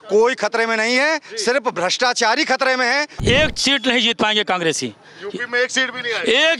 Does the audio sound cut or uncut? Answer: cut